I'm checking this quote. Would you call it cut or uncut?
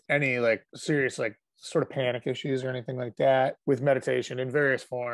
uncut